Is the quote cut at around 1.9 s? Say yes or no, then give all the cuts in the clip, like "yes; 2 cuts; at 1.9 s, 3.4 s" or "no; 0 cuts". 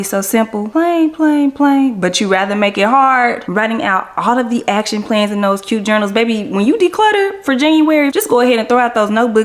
no; 2 cuts; at 3.4 s, 8.1 s